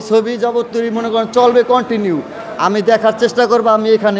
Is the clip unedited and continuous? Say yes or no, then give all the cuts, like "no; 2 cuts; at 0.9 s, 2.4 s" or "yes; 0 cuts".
yes; 0 cuts